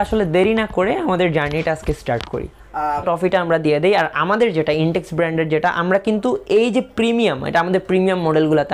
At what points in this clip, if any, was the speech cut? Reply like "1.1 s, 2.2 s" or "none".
3.0 s